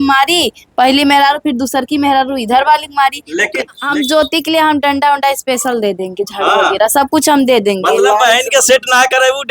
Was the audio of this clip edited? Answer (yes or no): yes